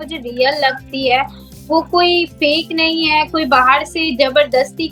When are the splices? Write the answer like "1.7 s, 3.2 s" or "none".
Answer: none